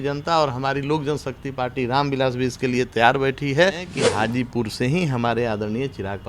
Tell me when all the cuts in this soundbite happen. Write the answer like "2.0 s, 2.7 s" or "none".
4.0 s